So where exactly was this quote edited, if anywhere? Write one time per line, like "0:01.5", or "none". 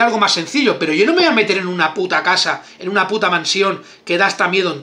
none